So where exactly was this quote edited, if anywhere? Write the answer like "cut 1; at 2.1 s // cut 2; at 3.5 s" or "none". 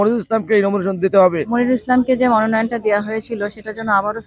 cut 1; at 1.5 s